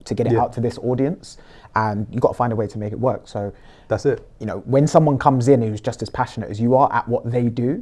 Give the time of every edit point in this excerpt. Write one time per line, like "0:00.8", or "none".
none